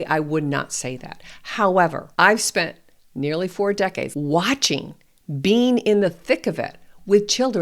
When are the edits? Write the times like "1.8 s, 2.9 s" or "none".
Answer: 2.0 s, 4.1 s